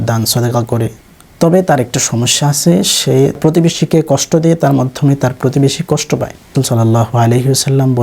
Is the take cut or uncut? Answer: cut